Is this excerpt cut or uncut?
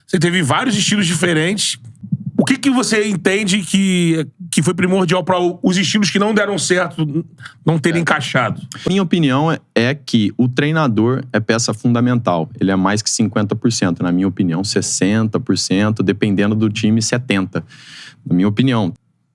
uncut